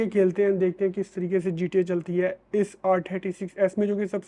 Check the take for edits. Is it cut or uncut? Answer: uncut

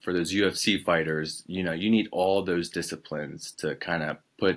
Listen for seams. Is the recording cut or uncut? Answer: uncut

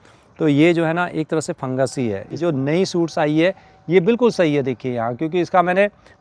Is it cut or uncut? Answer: uncut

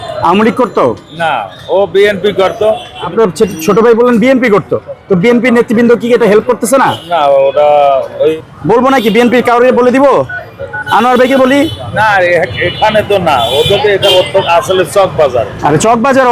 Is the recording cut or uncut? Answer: cut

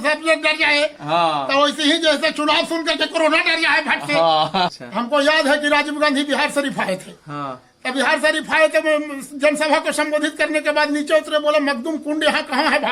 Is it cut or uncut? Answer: cut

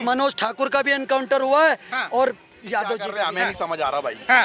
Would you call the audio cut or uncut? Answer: cut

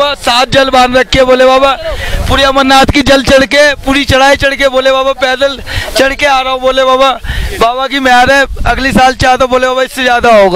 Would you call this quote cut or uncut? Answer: uncut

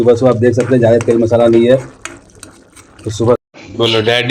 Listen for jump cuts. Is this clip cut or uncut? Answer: cut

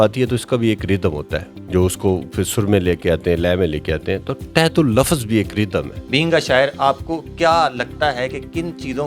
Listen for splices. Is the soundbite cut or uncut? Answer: cut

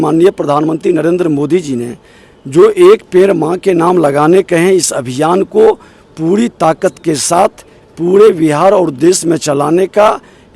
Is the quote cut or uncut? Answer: uncut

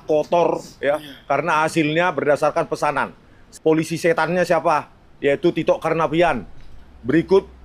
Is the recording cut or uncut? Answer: cut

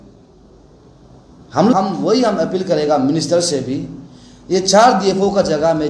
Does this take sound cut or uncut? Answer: cut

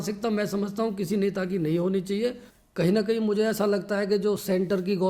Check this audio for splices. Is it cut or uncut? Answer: cut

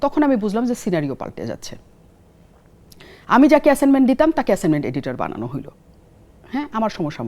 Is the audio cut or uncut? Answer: uncut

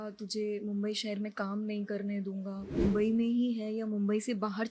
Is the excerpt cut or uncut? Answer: cut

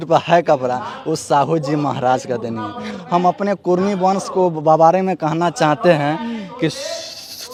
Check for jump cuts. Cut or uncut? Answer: uncut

